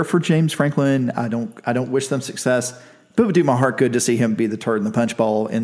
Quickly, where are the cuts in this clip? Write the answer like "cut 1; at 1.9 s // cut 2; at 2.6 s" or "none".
none